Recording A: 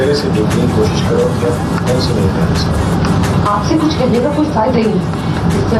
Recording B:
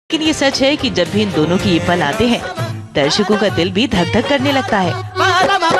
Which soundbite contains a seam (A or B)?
B